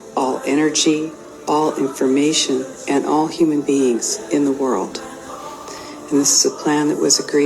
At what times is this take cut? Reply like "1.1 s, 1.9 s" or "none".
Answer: 1.5 s